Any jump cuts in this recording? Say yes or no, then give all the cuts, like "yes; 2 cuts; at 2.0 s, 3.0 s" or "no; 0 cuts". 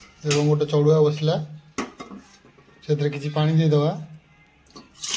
no; 0 cuts